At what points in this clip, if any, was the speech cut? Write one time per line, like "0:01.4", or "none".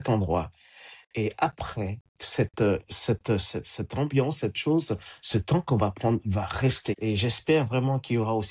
0:07.0

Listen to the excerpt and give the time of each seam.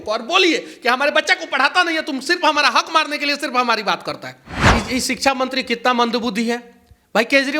0:04.6

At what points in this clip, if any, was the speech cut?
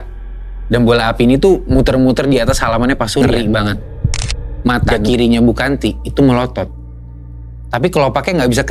0:03.2

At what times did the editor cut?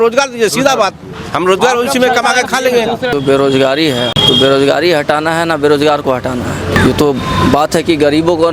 0:03.1
0:04.2
0:06.8

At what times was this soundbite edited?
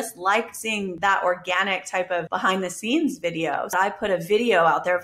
0:00.9
0:02.3
0:03.7

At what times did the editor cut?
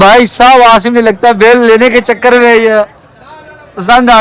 none

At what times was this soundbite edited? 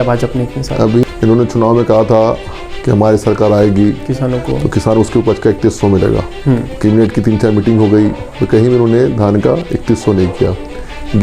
0:01.0
0:06.7

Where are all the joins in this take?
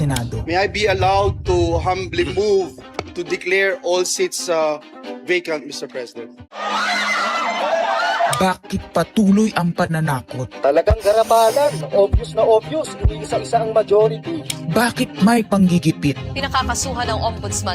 0:06.6

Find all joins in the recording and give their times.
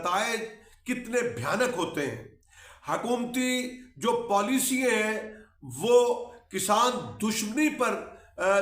none

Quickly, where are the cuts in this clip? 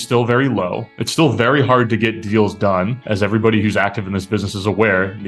none

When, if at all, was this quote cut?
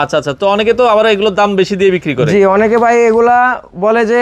none

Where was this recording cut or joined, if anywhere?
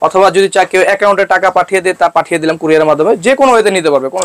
0:02.1

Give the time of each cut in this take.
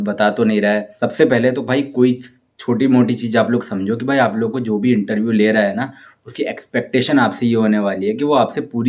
0:00.9

